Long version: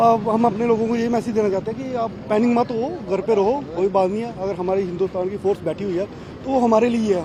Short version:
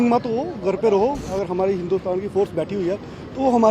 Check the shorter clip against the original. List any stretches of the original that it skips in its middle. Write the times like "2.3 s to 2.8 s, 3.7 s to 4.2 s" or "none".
3.7 s to 4.3 s